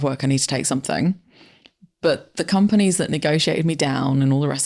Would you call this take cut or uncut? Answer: uncut